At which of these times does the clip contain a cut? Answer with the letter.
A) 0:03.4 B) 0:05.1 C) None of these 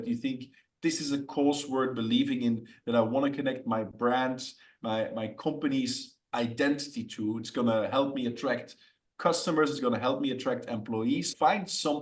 C